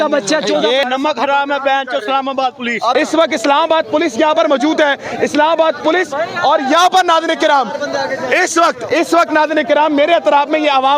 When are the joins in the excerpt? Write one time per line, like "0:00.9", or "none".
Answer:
0:00.8
0:02.9